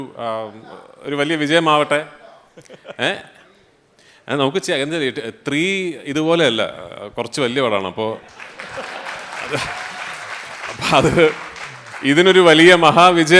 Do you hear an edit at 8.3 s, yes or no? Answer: no